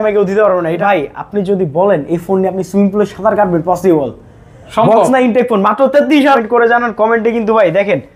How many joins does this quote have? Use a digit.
2